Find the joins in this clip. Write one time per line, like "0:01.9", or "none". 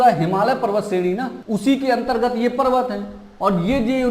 0:01.3